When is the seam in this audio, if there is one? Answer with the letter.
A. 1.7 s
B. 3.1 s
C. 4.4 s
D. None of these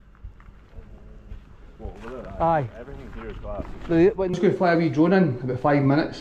C